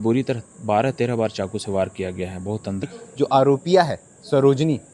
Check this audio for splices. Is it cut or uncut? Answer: cut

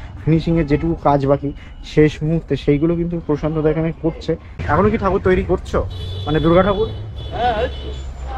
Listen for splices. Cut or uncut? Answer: cut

